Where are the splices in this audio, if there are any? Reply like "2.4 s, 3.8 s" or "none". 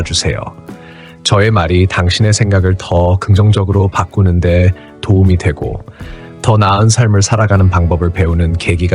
none